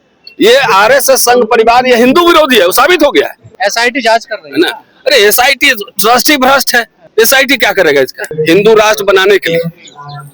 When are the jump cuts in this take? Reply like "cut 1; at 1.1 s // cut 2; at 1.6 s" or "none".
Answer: cut 1; at 3.5 s // cut 2; at 8.3 s